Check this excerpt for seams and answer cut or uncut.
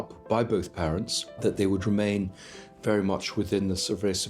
cut